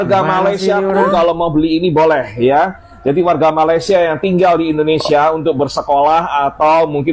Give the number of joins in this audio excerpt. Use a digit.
0